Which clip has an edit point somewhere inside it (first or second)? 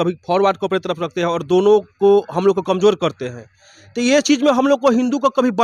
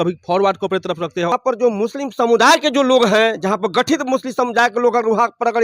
second